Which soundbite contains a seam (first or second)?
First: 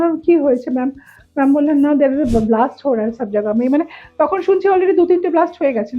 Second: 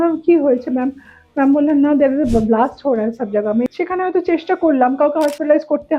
second